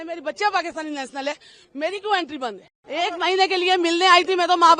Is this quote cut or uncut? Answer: cut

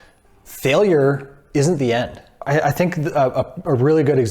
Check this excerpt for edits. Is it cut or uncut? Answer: cut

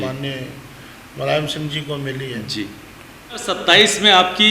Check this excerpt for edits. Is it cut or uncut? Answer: cut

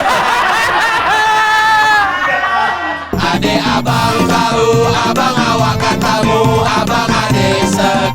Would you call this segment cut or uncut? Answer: cut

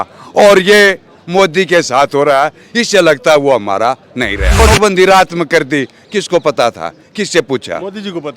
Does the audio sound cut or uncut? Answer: cut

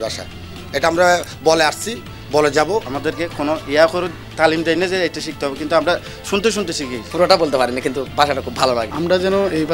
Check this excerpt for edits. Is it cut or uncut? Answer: cut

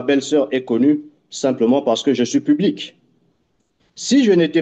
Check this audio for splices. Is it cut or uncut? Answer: uncut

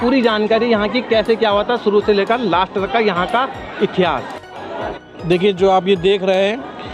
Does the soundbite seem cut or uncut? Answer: uncut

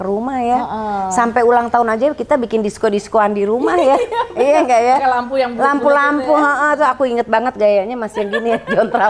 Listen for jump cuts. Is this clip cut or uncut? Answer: uncut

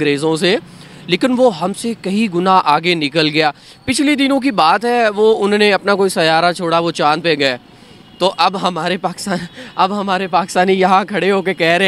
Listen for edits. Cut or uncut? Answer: uncut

